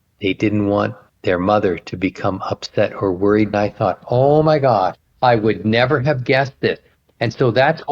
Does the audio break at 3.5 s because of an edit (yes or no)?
yes